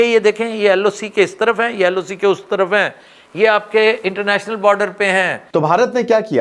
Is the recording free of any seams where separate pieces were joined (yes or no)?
no